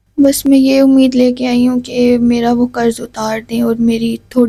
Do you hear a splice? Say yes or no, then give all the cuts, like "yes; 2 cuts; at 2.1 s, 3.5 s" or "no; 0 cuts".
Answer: no; 0 cuts